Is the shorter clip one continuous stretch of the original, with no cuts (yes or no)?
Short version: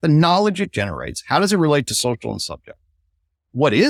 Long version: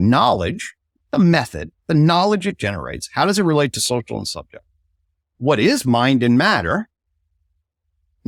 yes